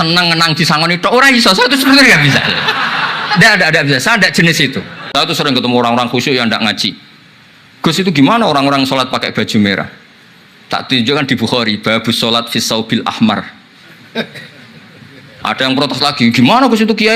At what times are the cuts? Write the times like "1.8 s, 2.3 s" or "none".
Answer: 5.1 s